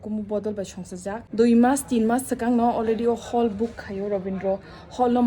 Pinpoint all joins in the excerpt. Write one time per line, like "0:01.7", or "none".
0:01.2